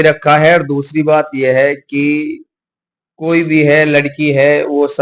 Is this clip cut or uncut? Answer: uncut